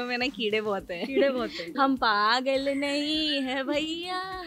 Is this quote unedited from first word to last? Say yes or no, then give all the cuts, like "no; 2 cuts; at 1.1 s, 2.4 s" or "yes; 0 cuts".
no; 1 cut; at 1.7 s